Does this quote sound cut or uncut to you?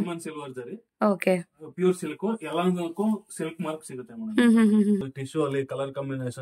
cut